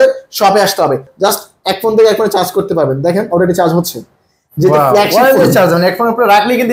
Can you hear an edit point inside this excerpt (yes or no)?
yes